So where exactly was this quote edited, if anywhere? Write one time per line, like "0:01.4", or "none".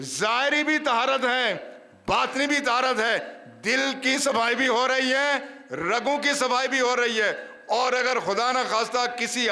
none